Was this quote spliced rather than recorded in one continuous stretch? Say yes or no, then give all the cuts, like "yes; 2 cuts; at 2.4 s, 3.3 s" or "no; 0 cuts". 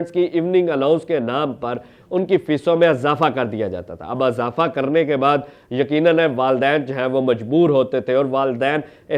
no; 0 cuts